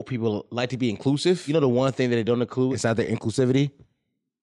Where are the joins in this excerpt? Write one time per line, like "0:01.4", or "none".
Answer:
0:01.4
0:02.7